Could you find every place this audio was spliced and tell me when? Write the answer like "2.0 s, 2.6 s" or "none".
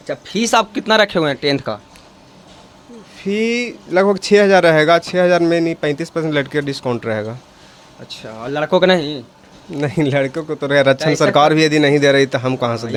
none